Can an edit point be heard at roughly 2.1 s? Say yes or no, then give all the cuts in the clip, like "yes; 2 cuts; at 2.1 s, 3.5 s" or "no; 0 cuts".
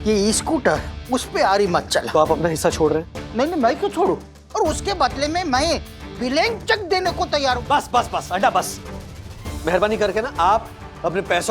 yes; 3 cuts; at 2.1 s, 4.4 s, 7.6 s